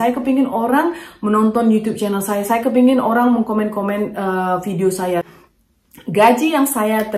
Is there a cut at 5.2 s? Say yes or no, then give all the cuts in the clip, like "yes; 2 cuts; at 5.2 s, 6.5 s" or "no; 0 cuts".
yes; 1 cut; at 5.2 s